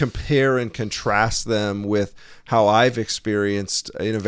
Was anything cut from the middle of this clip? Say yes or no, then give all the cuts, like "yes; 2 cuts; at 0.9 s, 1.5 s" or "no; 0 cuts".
no; 0 cuts